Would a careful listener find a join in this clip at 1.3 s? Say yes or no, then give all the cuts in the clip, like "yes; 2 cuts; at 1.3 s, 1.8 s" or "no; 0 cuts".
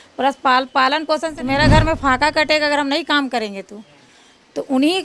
yes; 1 cut; at 1.3 s